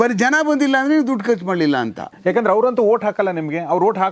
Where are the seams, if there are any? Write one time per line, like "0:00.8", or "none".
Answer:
0:02.0